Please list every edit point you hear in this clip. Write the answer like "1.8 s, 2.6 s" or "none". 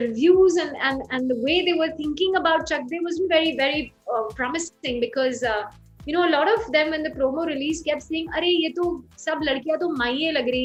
none